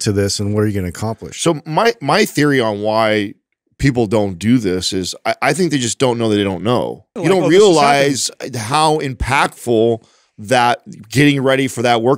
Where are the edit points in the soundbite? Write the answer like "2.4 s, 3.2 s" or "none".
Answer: 7.1 s